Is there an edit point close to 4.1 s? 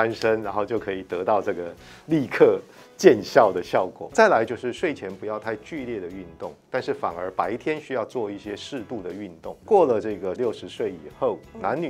yes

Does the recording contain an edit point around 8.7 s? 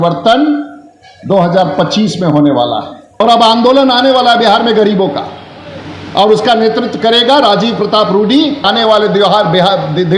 yes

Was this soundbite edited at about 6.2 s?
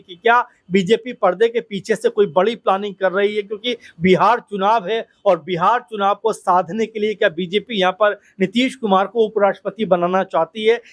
no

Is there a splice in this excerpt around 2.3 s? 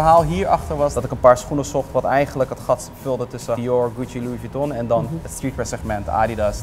no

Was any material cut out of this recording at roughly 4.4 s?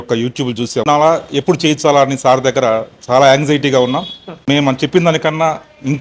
yes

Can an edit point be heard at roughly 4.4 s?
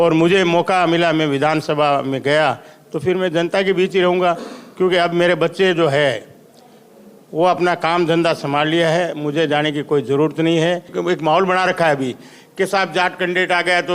no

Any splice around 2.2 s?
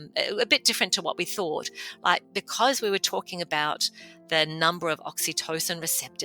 yes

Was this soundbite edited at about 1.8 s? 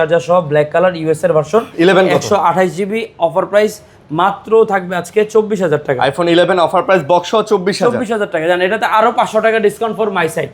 no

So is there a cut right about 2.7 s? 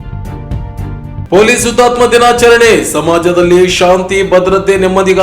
no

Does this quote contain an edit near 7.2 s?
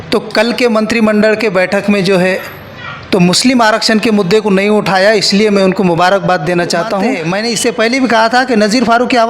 yes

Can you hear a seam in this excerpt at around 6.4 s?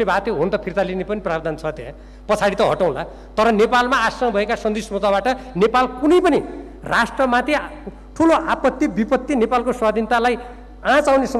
no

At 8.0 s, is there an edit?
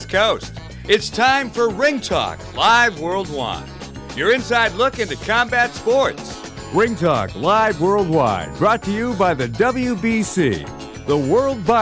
no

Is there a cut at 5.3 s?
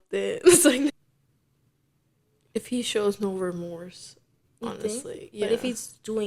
no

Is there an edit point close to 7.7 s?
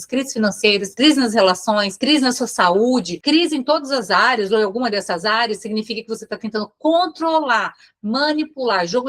no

